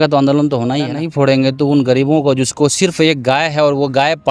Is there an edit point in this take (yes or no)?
yes